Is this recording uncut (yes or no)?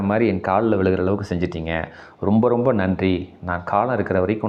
yes